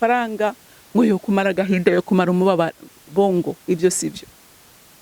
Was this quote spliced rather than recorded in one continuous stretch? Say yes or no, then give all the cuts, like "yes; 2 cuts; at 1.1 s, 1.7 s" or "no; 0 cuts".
no; 0 cuts